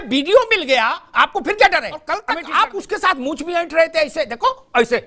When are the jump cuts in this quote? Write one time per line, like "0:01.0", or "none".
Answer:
0:02.2

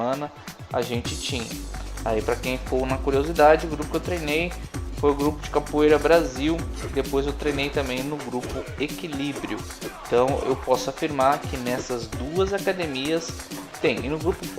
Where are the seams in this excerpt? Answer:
0:05.7

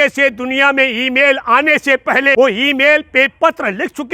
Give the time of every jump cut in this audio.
0:02.3

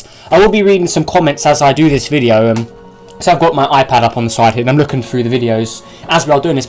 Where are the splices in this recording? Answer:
0:03.9

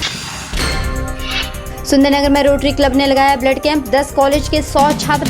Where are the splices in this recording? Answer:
0:01.6

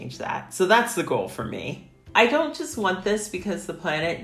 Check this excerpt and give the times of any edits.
0:01.7

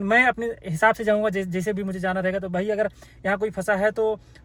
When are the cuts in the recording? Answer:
none

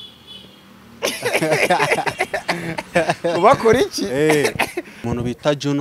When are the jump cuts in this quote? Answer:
0:04.9

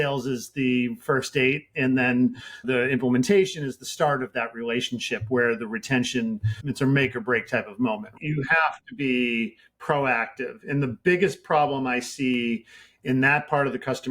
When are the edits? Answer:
0:02.6
0:06.6
0:08.2

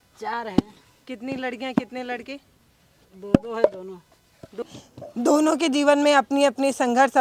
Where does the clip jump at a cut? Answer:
0:04.7

